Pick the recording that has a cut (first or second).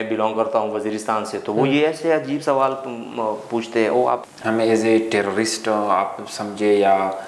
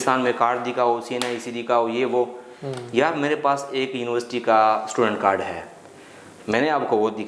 first